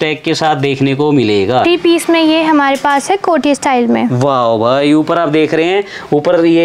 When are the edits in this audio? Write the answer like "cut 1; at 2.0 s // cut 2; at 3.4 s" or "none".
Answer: cut 1; at 1.6 s